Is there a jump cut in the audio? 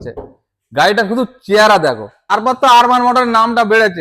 yes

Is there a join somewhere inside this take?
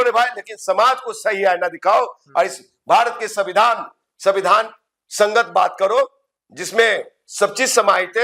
no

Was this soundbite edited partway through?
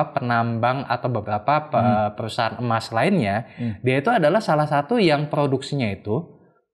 no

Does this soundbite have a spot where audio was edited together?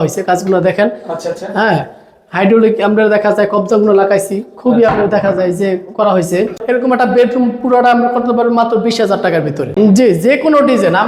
yes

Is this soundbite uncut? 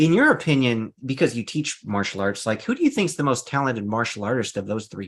yes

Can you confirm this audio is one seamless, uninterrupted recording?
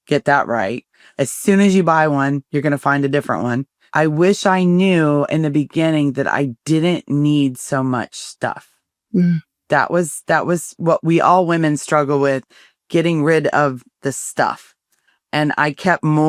no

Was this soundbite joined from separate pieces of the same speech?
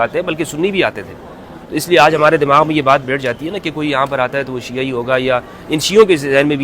no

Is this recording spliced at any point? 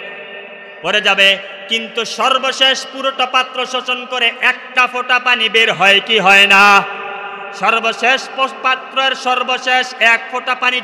no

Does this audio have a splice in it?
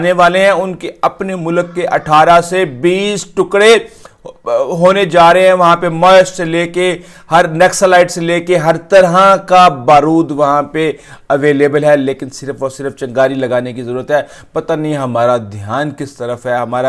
no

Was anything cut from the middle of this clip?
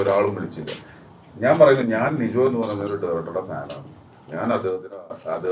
no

